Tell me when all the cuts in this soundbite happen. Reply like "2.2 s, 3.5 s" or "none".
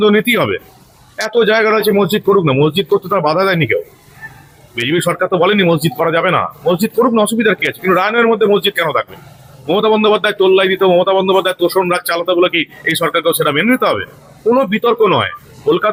none